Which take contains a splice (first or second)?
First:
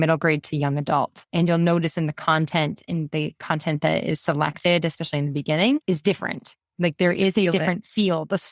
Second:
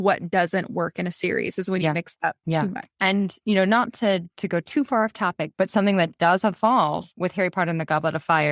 second